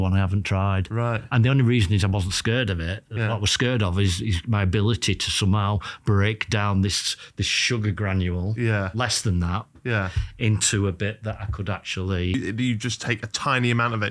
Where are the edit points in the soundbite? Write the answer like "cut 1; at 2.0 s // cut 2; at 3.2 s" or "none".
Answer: cut 1; at 12.3 s